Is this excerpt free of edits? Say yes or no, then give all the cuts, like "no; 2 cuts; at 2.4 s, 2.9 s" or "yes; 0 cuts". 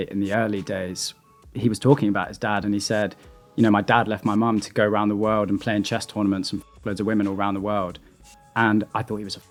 yes; 0 cuts